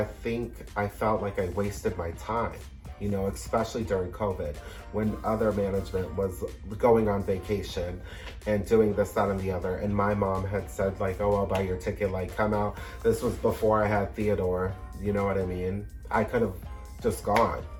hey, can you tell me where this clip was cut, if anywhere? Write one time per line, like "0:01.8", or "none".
none